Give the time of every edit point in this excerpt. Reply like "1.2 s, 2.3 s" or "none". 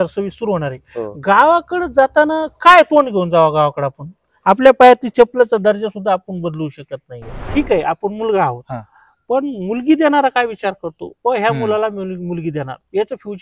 7.5 s